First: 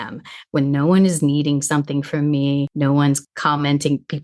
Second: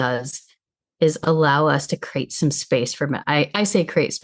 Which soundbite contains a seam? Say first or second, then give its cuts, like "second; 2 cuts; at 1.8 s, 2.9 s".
first; 1 cut; at 3.0 s